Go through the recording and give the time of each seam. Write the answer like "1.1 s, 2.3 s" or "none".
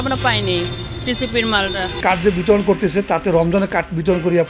1.9 s